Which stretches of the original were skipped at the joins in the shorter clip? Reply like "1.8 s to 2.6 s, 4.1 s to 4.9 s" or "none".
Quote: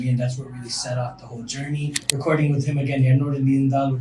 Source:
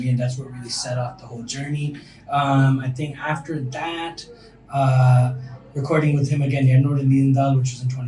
2.0 s to 5.7 s